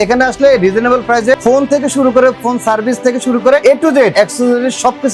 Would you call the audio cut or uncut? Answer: cut